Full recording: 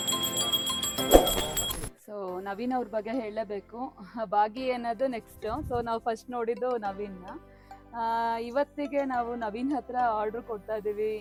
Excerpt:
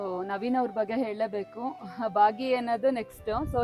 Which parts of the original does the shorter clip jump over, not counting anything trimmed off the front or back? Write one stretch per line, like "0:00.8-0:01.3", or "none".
none